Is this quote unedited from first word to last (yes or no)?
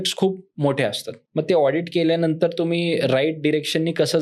yes